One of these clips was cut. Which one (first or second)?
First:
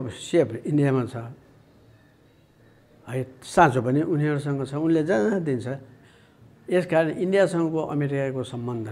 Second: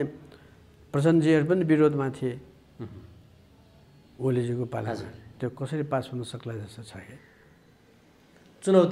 second